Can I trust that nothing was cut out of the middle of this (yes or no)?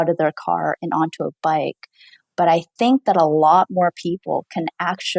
yes